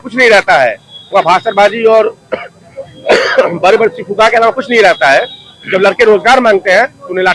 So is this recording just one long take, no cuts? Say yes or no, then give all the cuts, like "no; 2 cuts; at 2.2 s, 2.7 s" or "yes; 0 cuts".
yes; 0 cuts